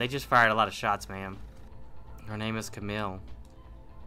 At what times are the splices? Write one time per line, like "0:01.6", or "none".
none